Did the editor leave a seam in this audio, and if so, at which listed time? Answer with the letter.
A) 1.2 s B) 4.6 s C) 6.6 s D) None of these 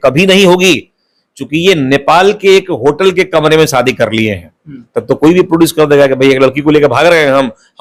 D